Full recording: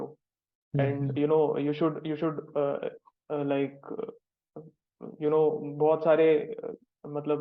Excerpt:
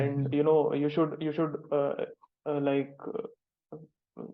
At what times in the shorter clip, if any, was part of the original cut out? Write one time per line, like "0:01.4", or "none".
none